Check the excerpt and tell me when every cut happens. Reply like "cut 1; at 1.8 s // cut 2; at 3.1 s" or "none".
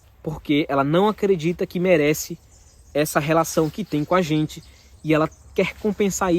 none